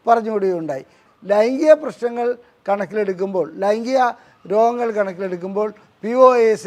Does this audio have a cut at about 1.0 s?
yes; 1 cut; at 1.0 s

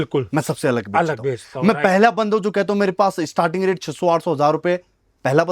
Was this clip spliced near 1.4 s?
no; 0 cuts

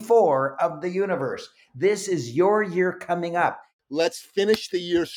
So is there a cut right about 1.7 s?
no; 1 cut; at 3.7 s

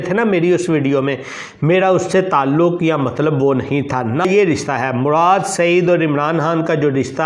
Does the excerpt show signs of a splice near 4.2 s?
yes; 1 cut; at 4.2 s

